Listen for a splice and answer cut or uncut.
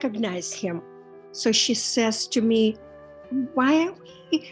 uncut